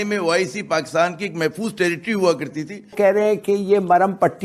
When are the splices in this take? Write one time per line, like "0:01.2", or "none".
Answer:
0:02.9